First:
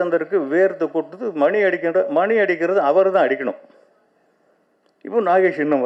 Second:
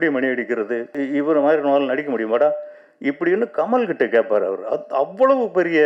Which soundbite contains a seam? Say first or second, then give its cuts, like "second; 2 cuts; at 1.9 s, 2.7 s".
second; 1 cut; at 0.9 s